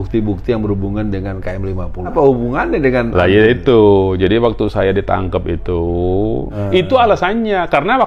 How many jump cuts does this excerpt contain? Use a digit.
2